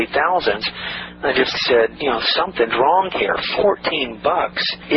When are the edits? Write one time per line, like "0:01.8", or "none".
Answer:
none